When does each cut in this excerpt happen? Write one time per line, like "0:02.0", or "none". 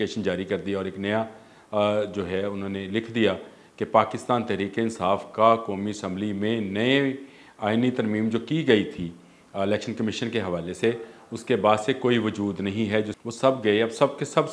0:13.2

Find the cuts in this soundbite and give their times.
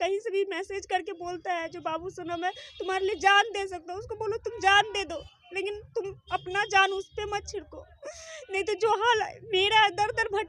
none

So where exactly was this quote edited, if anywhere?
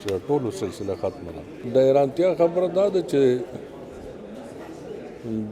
0:01.6

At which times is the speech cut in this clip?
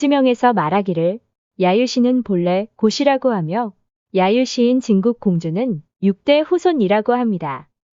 0:05.8

